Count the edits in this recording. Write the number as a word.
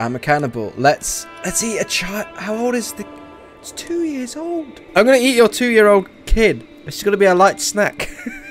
one